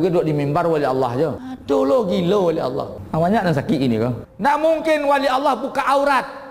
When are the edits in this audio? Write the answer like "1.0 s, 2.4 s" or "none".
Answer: 1.5 s, 3.0 s, 4.2 s